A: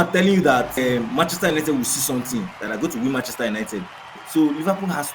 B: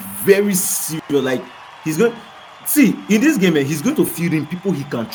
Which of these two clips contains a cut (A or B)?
A